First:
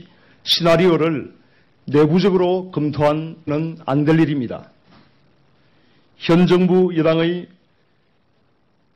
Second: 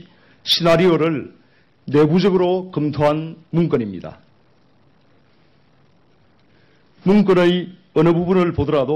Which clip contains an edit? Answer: second; 1 cut; at 3.3 s

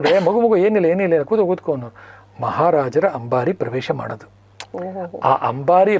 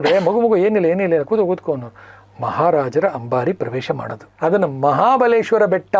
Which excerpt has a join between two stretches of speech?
second; 1 cut; at 4.3 s

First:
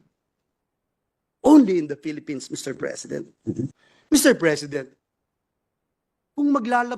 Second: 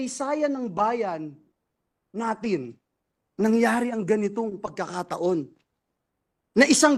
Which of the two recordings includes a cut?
first; 1 cut; at 3.9 s

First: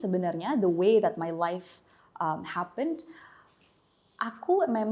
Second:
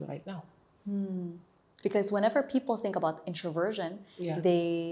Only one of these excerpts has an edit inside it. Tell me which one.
second; 1 cut; at 1.6 s

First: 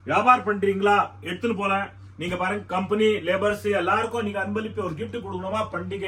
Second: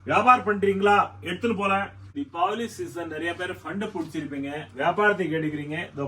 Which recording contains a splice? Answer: second; 1 cut; at 2.0 s

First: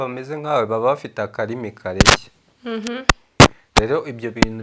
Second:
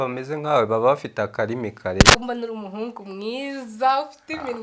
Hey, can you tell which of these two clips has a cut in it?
second; 1 cut; at 2.2 s

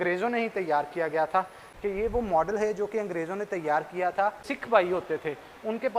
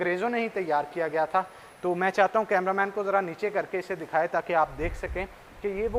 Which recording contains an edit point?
first; 2 cuts; at 1.6 s, 4.5 s

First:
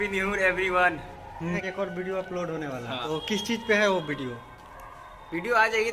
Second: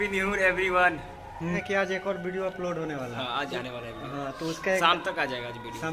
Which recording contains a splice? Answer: first; 2 cuts; at 1.6 s, 3.0 s

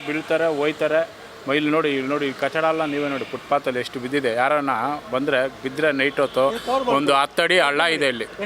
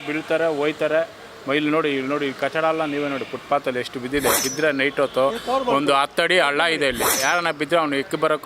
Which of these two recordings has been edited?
second; 2 cuts; at 4.3 s, 7.1 s

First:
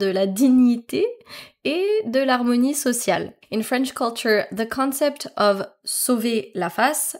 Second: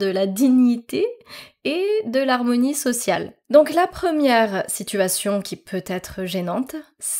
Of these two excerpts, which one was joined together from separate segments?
second; 1 cut; at 3.3 s

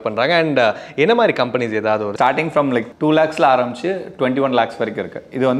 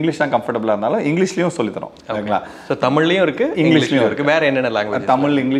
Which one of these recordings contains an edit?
first; 1 cut; at 2.1 s

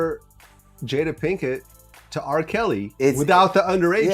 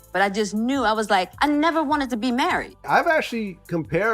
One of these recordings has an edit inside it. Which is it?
second; 1 cut; at 2.7 s

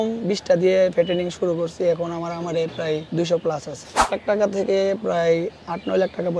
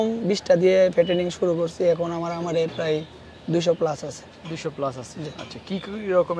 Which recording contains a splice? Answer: first; 2 cuts; at 3.1 s, 4.0 s

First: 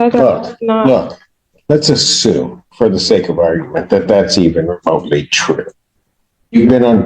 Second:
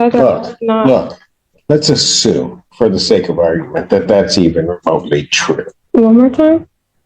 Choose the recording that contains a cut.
second; 1 cut; at 5.8 s

